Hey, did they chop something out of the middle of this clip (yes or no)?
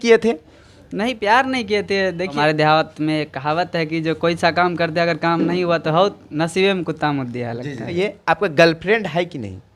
yes